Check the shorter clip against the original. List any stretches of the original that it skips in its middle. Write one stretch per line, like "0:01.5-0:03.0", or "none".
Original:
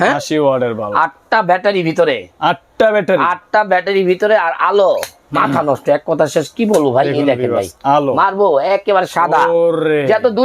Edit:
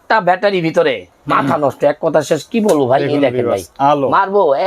0:02.3-0:05.1